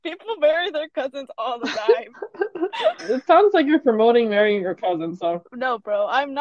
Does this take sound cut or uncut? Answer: cut